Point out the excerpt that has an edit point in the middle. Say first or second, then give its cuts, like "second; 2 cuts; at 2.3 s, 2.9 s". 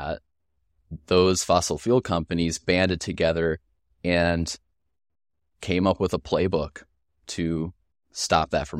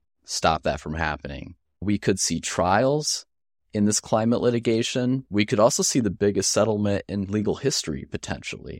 second; 2 cuts; at 1.8 s, 5.2 s